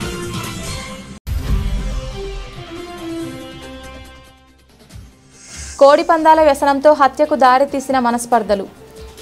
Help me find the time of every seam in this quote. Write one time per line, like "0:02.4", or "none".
0:01.1
0:05.7